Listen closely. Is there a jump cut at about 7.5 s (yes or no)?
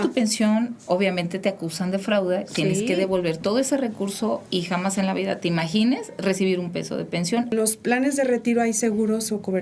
yes